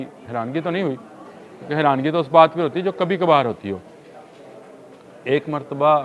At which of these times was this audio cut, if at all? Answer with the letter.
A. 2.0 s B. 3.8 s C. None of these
C